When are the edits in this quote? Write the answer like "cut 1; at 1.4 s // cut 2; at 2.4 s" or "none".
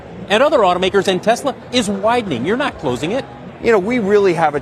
cut 1; at 3.4 s